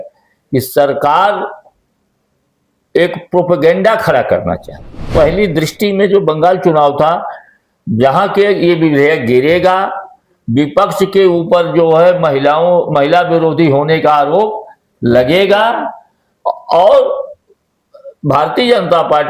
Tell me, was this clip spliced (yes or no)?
yes